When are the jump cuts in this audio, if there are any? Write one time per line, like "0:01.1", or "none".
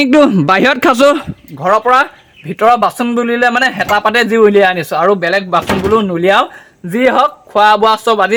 none